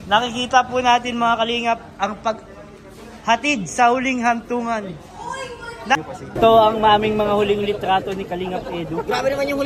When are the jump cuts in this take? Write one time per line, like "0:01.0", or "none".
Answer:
0:06.0